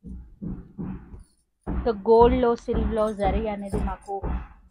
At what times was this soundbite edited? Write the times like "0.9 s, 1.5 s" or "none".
none